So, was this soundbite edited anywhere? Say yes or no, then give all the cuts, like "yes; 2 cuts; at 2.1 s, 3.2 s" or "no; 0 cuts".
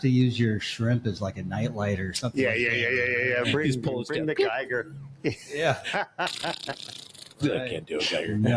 no; 0 cuts